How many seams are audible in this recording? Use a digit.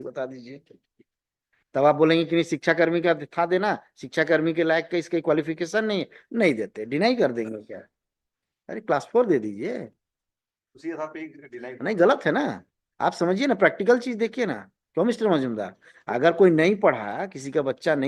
0